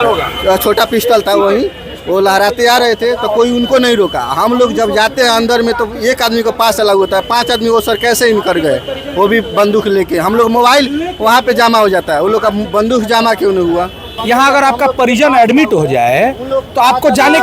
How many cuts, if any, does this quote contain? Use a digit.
1